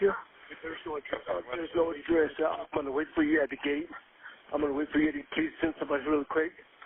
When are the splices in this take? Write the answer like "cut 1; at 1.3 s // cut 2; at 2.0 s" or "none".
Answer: cut 1; at 2.0 s